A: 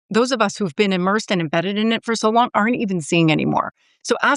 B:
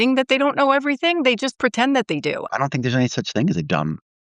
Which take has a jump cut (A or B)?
B